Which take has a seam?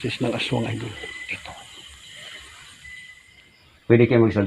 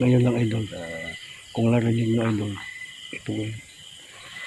first; 1 cut; at 3.2 s

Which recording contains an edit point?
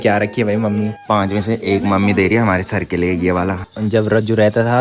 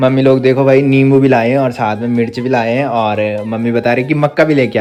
first; 2 cuts; at 1.0 s, 3.7 s

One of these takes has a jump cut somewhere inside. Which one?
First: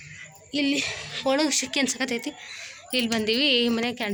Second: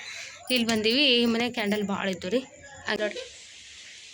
second; 1 cut; at 2.9 s

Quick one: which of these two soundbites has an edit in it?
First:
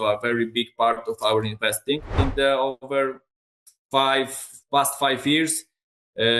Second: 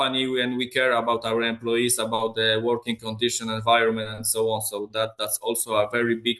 first; 1 cut; at 2.1 s

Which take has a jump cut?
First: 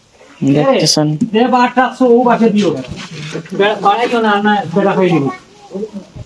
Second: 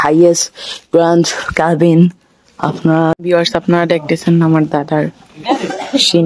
second; 1 cut; at 3.1 s

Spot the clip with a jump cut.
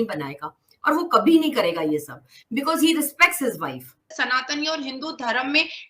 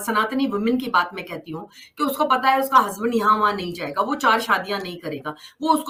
first; 1 cut; at 4.2 s

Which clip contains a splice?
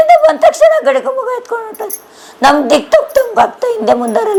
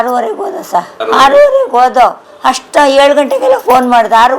second; 2 cuts; at 0.9 s, 2.3 s

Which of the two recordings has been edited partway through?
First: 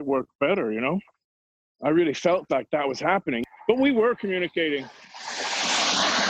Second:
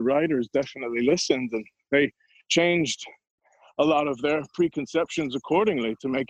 first; 2 cuts; at 1.4 s, 3.4 s

